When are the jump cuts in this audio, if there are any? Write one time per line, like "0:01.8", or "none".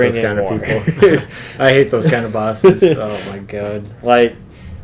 none